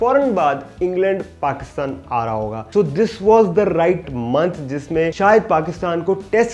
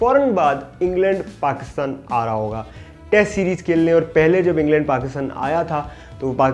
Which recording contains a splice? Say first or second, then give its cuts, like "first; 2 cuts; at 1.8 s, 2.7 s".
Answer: first; 2 cuts; at 2.6 s, 4.1 s